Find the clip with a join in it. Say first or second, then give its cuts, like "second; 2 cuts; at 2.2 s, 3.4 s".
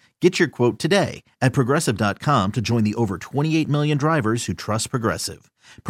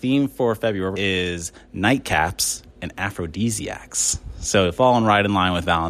second; 1 cut; at 0.9 s